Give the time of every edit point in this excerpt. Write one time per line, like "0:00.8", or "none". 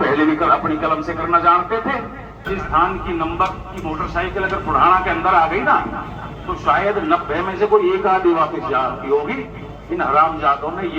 0:02.5